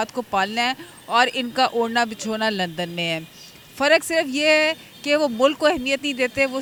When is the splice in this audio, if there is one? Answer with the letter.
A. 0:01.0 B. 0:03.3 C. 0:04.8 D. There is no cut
D